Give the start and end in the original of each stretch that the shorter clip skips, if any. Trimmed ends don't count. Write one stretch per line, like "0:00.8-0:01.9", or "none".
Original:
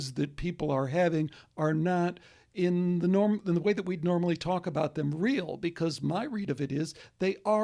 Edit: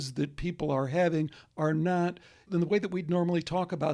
0:02.5-0:03.4